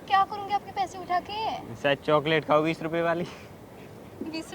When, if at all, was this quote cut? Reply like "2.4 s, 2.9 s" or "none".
3.3 s